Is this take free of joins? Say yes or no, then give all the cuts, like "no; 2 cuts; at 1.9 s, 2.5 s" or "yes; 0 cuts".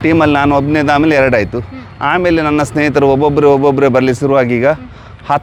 yes; 0 cuts